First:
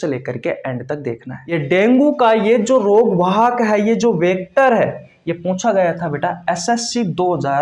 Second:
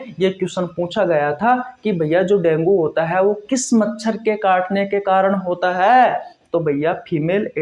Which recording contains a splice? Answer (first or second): first